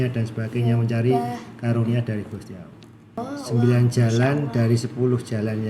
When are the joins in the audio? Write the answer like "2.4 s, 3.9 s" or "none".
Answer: 3.2 s